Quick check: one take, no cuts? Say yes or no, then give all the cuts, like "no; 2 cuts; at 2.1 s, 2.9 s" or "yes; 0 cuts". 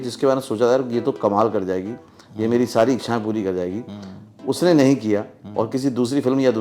yes; 0 cuts